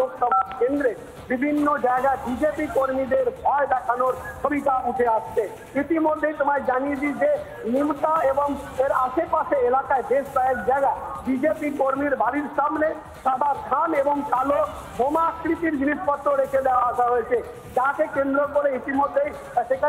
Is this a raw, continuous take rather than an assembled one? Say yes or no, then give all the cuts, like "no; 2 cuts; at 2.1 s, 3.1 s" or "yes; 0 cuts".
yes; 0 cuts